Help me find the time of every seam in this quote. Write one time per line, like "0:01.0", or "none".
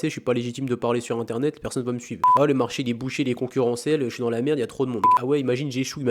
0:02.2
0:05.1